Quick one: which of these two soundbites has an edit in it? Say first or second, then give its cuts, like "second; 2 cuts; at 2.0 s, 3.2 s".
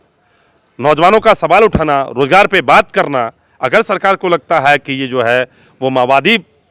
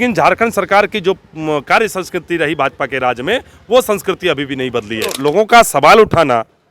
second; 1 cut; at 5.2 s